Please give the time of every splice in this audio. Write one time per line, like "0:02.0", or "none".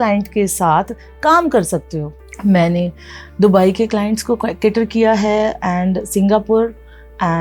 0:02.2